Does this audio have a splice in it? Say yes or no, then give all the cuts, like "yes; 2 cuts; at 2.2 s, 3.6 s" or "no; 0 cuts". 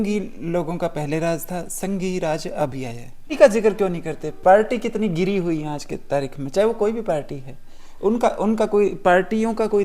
yes; 1 cut; at 3.3 s